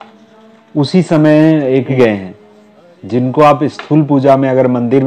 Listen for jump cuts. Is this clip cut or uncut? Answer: cut